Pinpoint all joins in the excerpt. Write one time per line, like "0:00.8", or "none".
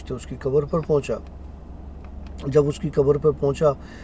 none